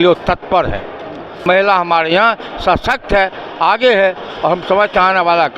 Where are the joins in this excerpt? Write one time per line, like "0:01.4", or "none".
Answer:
0:01.4